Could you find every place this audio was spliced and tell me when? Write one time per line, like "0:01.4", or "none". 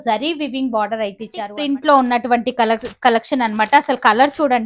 0:01.5